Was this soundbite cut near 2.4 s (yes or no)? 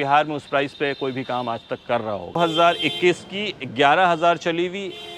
yes